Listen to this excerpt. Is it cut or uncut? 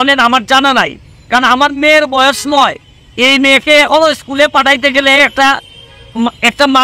uncut